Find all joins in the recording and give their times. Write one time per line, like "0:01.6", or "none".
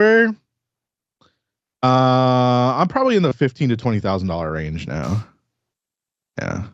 none